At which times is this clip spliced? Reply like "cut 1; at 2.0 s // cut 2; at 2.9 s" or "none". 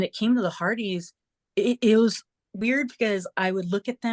none